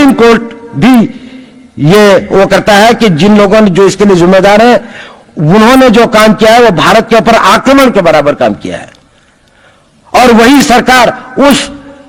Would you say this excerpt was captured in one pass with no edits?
yes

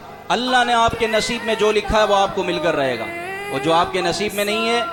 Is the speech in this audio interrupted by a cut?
no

